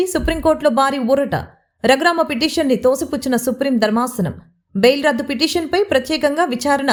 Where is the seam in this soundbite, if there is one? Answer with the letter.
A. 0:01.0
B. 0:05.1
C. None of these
C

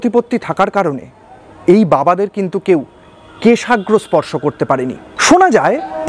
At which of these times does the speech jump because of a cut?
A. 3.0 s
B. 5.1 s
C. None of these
B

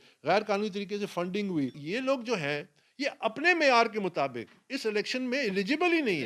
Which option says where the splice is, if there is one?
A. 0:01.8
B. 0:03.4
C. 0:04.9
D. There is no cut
A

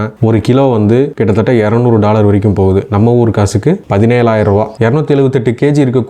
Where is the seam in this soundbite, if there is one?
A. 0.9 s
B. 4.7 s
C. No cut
B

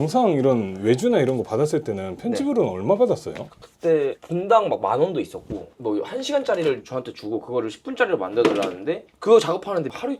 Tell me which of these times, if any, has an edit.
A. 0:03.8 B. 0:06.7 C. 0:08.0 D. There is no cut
D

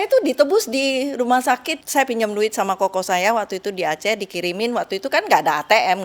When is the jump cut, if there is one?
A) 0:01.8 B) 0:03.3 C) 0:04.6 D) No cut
A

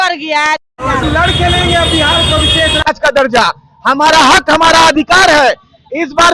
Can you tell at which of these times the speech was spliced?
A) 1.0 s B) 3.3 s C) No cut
A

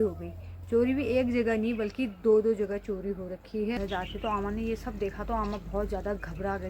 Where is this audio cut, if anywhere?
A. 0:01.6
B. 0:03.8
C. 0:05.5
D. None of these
B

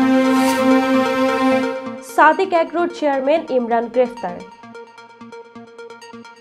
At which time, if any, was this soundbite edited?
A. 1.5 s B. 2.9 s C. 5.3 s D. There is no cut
A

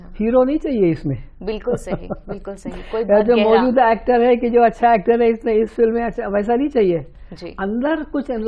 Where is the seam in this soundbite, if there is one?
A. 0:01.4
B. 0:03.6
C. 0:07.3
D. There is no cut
D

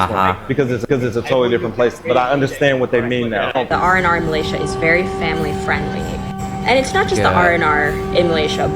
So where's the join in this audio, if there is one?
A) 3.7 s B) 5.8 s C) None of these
A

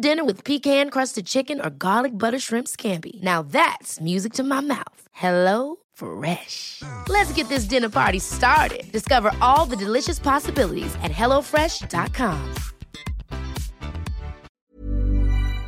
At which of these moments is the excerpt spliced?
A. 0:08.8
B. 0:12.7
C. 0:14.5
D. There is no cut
C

